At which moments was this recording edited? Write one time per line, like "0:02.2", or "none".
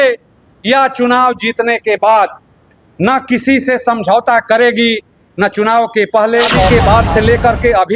0:06.7